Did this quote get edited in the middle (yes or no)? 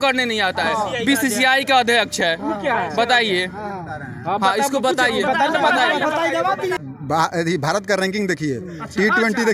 yes